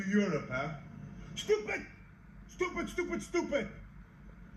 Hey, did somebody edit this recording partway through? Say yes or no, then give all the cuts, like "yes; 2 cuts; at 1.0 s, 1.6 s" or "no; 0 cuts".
no; 0 cuts